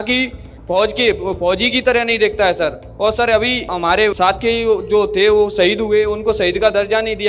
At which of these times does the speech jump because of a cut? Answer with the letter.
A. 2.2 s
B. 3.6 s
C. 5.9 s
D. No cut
D